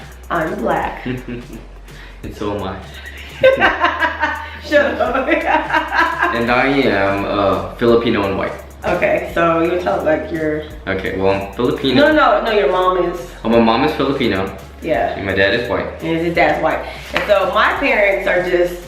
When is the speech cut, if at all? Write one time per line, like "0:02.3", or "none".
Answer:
none

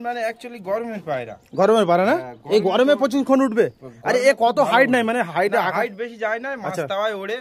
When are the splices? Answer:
none

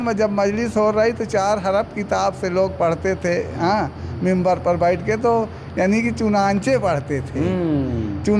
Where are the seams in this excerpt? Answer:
none

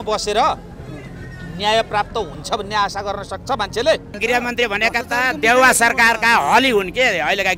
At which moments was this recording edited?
0:04.2

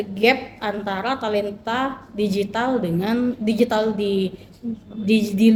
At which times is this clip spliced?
none

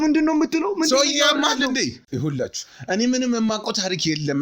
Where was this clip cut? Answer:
0:02.0

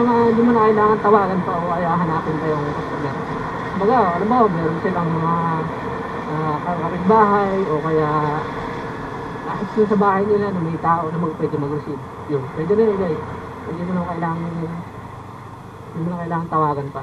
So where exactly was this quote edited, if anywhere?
none

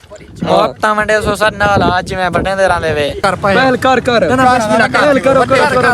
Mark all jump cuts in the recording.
0:03.2

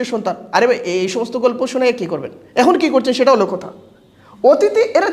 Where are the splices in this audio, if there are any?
none

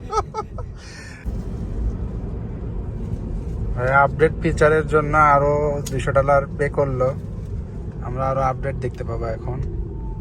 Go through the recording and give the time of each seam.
0:01.3

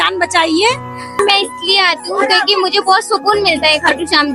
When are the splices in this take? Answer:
0:01.2

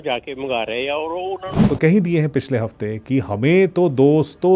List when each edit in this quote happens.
0:01.6

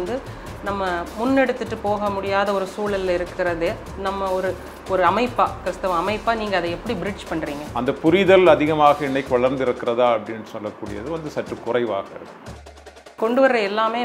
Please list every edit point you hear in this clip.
0:07.6
0:13.0

